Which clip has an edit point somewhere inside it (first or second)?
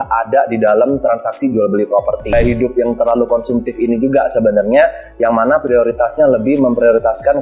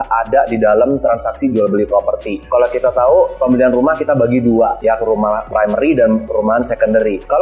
first